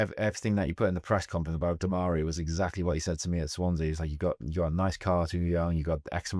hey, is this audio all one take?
yes; 0 cuts

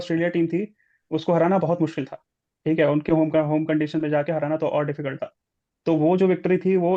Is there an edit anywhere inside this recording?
no; 0 cuts

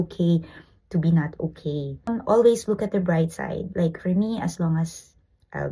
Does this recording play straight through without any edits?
yes; 0 cuts

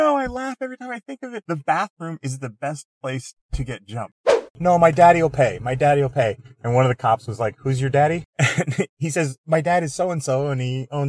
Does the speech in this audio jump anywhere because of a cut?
yes; 3 cuts; at 1.4 s, 4.5 s, 8.3 s

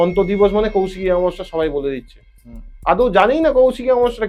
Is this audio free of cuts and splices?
yes; 0 cuts

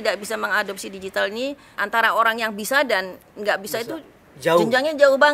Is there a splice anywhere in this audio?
yes; 1 cut; at 1.7 s

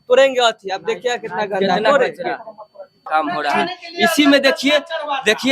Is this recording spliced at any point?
yes; 1 cut; at 2.9 s

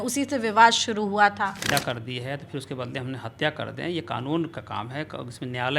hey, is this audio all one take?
no; 1 cut; at 1.7 s

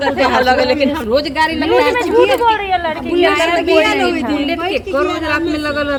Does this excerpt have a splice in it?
no; 0 cuts

